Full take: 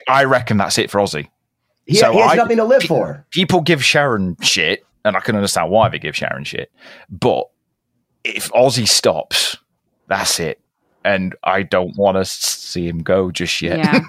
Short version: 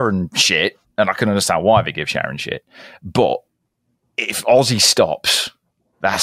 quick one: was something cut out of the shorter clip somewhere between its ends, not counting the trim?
no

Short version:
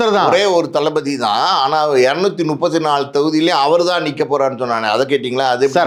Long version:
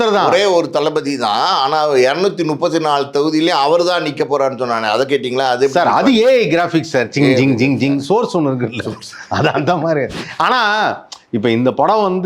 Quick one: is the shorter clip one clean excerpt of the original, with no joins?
yes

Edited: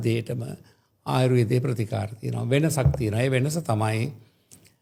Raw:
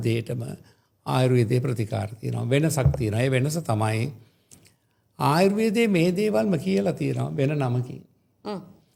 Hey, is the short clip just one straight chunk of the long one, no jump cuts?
yes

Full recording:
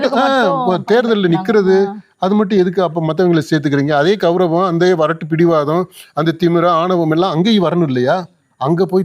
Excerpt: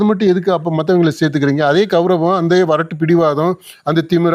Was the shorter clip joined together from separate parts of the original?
no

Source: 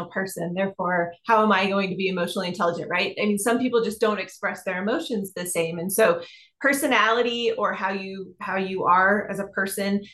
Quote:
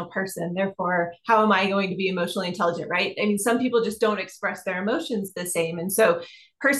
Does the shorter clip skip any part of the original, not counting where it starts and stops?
no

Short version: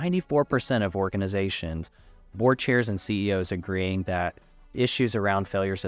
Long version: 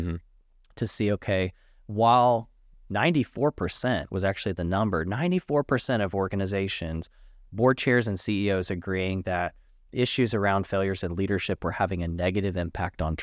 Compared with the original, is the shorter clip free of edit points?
yes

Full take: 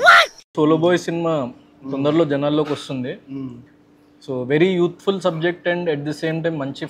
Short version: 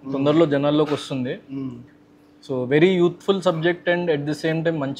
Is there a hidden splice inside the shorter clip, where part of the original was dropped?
no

